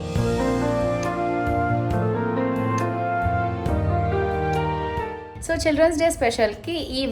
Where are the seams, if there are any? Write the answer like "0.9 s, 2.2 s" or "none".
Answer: 5.3 s

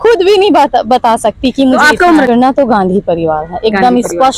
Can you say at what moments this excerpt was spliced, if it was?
2.3 s

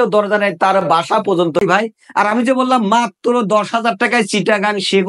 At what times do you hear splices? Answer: 1.6 s

